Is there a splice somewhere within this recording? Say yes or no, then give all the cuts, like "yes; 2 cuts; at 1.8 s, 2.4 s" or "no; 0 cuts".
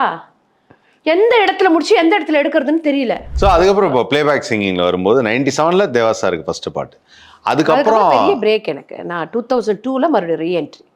yes; 1 cut; at 3.3 s